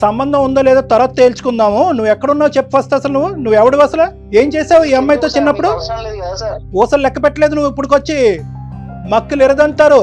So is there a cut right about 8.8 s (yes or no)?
no